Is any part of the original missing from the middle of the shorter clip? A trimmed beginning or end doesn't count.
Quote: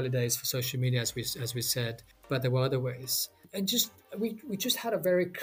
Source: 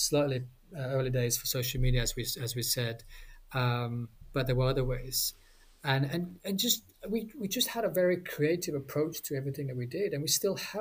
yes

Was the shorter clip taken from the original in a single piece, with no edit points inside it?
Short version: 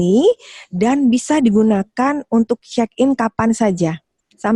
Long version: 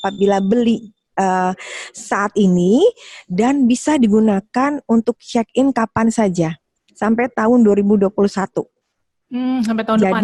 yes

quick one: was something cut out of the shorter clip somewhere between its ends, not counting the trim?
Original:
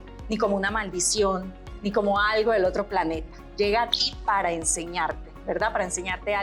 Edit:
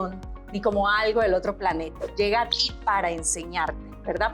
yes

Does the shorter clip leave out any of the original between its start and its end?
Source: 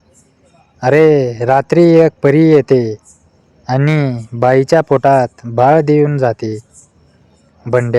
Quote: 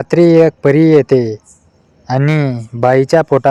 no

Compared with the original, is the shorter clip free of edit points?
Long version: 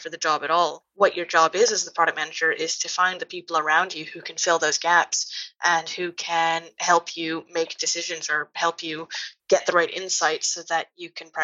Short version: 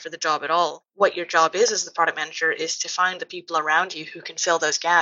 yes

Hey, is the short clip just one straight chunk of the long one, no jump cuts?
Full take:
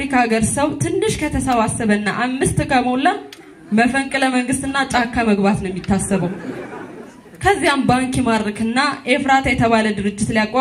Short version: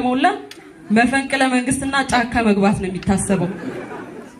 yes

